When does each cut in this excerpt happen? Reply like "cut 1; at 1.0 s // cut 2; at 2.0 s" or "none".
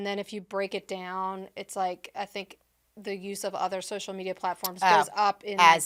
none